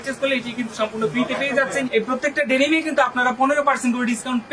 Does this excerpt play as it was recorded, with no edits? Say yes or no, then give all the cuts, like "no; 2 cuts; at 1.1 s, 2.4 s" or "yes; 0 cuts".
no; 1 cut; at 1.9 s